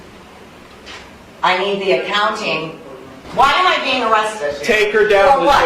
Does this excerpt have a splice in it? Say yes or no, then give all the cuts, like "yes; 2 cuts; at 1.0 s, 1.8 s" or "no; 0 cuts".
yes; 1 cut; at 3.2 s